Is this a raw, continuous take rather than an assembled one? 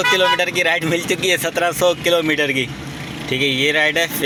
yes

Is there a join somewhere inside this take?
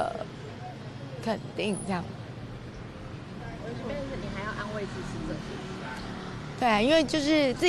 no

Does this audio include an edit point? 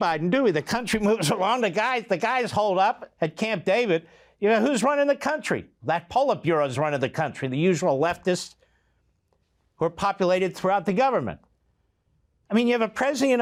no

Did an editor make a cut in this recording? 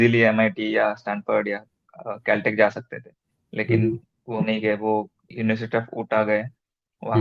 yes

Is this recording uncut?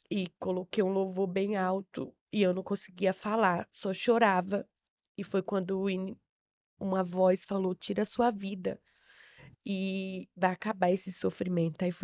yes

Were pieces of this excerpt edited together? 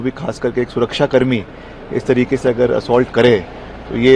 no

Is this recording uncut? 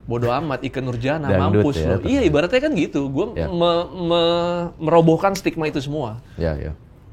yes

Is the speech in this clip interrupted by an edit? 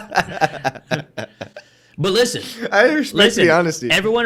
no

